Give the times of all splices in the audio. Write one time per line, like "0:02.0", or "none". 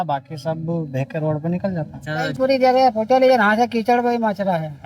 0:02.3